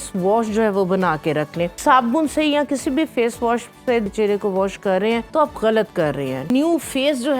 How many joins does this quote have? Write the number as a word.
four